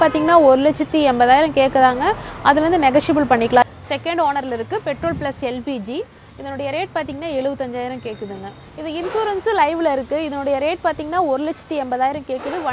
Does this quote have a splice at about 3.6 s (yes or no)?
yes